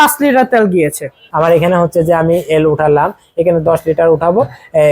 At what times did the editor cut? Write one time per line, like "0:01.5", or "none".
0:01.2